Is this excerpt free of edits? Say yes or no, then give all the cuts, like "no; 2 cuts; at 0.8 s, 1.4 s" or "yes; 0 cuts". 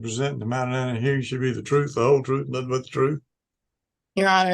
yes; 0 cuts